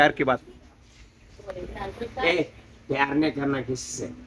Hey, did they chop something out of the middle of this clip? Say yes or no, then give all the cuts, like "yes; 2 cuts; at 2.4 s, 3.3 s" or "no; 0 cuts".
no; 0 cuts